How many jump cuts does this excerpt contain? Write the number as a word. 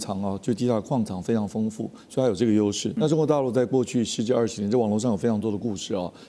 one